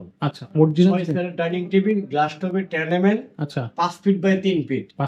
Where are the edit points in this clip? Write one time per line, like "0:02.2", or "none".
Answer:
none